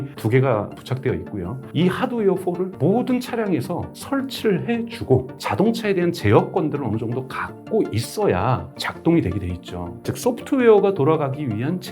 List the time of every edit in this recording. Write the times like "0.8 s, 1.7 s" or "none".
10.1 s